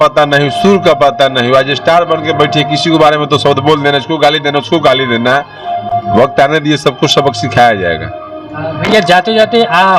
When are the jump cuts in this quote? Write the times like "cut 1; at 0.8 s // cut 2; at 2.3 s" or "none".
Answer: none